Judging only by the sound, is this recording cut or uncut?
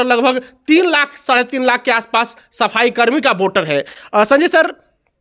uncut